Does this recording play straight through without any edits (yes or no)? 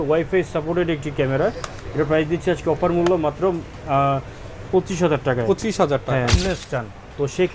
no